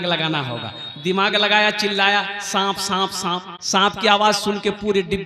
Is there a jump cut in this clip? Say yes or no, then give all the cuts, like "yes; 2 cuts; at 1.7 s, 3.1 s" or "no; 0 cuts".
yes; 1 cut; at 3.5 s